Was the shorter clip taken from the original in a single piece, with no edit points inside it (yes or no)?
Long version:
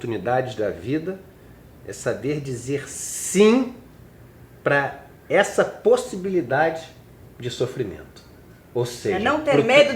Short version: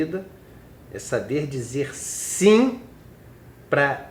yes